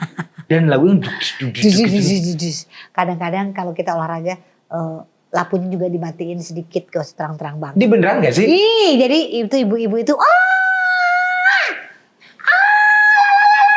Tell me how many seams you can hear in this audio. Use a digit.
0